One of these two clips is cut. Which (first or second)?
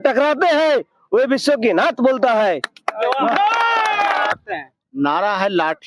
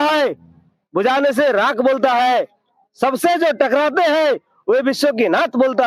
first